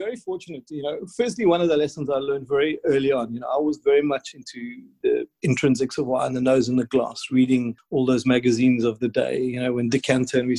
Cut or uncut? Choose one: cut